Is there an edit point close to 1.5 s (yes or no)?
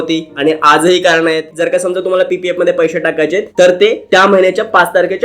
yes